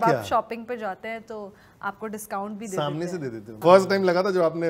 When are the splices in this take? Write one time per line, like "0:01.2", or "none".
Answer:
0:03.6

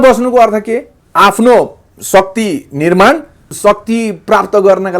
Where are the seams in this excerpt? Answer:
0:01.0
0:03.5

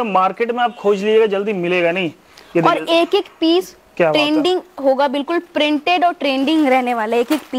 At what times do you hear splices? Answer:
none

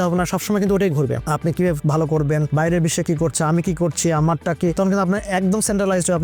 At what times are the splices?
none

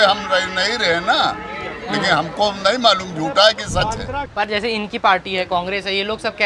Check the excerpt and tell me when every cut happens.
0:04.3

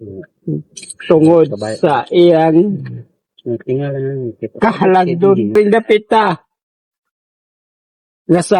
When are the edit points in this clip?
0:05.5

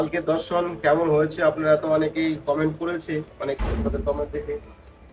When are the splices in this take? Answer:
none

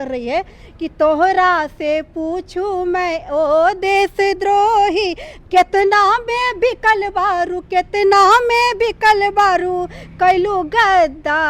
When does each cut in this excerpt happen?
none

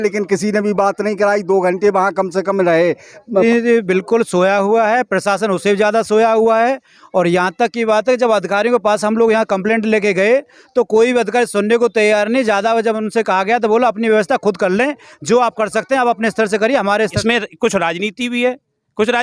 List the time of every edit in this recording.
0:03.4
0:17.0

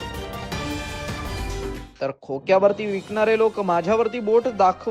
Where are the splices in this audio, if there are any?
0:01.4

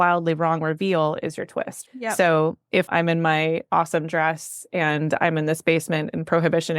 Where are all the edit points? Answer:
0:01.8
0:02.8

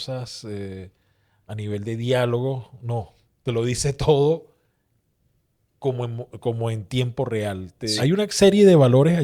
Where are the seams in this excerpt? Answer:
0:07.9

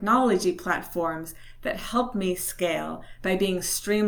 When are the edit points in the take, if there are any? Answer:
none

